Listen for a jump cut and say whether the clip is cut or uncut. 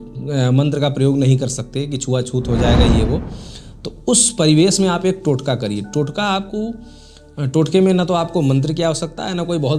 uncut